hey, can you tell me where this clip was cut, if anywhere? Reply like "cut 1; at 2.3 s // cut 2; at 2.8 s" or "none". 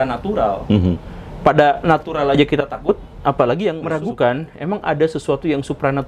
cut 1; at 3.8 s